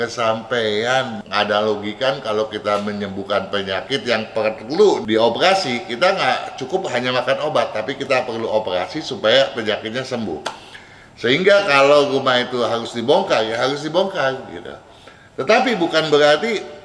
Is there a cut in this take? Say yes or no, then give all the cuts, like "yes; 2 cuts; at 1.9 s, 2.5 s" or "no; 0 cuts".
yes; 2 cuts; at 1.2 s, 5.0 s